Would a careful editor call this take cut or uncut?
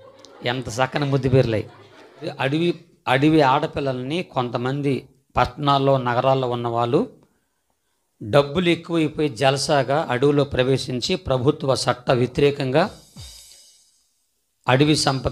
cut